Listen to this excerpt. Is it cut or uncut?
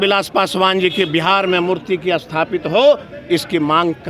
uncut